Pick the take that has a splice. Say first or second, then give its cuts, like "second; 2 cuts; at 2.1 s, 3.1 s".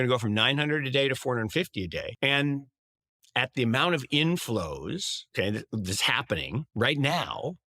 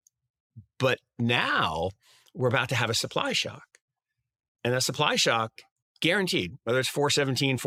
first; 3 cuts; at 2.1 s, 5.2 s, 6.7 s